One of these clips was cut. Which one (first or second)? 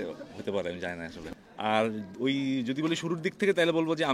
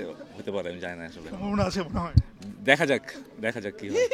first